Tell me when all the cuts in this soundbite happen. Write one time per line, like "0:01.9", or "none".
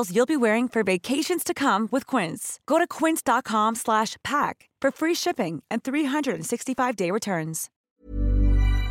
0:07.7